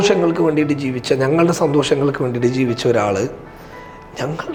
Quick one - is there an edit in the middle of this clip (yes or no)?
no